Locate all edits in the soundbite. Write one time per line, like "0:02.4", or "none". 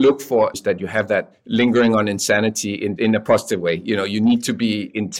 0:01.2
0:02.9